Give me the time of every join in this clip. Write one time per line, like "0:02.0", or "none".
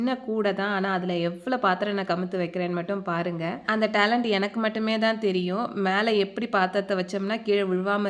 none